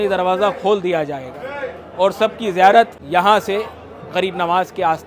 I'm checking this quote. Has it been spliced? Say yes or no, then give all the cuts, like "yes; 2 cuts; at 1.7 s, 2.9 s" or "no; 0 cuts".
yes; 1 cut; at 3.0 s